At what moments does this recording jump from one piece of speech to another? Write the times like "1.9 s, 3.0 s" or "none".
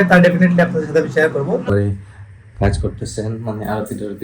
1.7 s